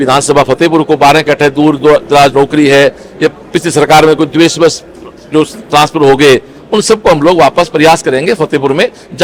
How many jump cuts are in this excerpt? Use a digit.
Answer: 0